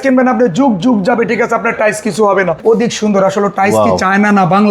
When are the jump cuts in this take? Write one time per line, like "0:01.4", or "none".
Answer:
0:02.6